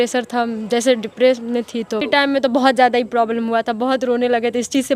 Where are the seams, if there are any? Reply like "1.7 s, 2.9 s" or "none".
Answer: 2.0 s